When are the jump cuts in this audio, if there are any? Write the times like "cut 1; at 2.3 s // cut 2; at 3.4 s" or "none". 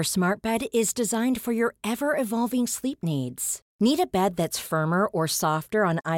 none